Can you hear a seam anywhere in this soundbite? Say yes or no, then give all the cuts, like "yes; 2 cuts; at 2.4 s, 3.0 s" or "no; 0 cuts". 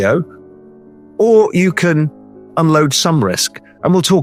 no; 0 cuts